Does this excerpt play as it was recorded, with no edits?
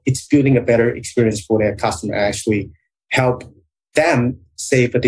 no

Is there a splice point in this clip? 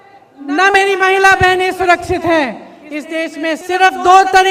yes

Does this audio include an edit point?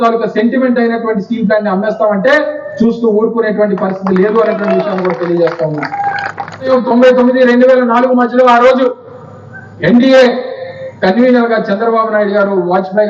yes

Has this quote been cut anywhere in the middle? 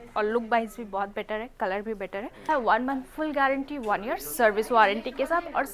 yes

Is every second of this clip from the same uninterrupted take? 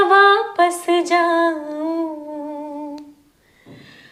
yes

